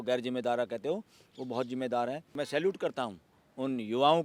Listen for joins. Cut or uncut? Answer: cut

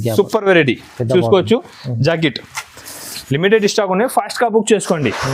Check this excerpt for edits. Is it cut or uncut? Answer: uncut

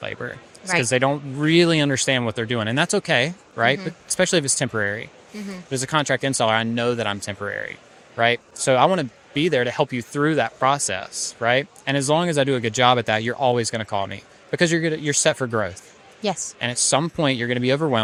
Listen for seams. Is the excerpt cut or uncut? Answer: uncut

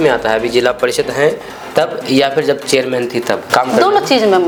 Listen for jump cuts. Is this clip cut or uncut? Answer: uncut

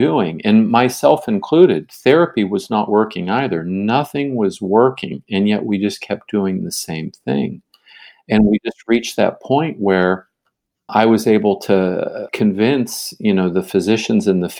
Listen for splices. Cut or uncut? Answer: cut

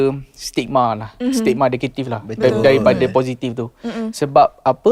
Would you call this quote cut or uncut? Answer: uncut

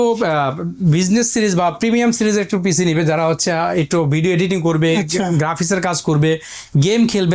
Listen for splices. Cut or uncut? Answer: uncut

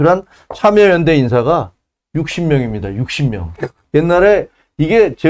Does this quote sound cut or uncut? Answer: cut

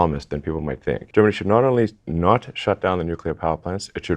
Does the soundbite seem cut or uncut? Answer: cut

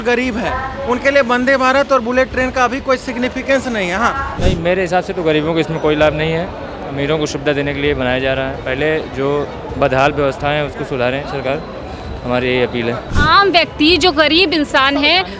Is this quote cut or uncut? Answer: cut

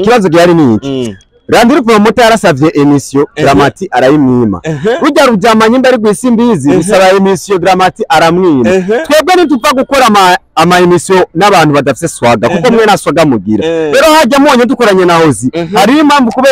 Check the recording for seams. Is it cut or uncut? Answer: uncut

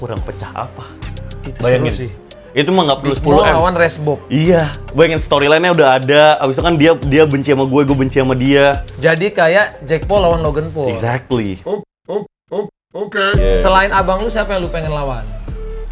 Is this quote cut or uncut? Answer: uncut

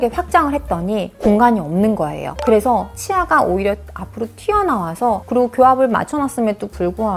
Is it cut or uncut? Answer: uncut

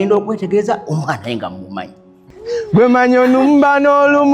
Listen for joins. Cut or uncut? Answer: cut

